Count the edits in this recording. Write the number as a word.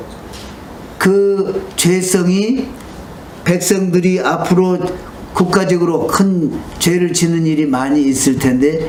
zero